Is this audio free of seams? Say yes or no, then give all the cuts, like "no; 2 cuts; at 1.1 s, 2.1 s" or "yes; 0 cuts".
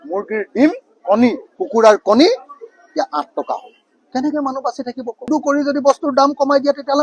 no; 1 cut; at 5.3 s